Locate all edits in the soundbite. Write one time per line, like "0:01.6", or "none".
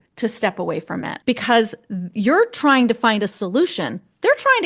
0:01.1